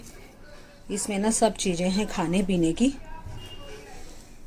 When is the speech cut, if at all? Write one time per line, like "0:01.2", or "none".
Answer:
none